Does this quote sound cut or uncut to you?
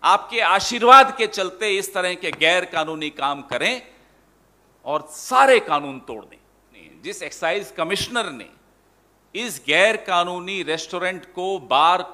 cut